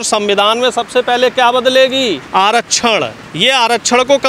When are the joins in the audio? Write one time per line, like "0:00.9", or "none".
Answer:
0:02.2
0:03.2